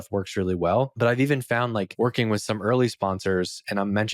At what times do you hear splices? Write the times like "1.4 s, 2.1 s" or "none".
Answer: 0.9 s, 1.9 s